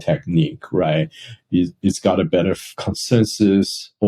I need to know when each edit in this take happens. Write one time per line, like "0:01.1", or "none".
none